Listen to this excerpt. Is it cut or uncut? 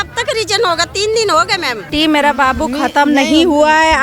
cut